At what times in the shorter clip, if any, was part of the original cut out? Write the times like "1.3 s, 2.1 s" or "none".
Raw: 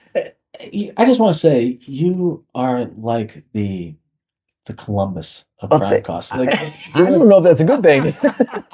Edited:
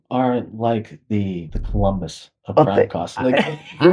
1.6 s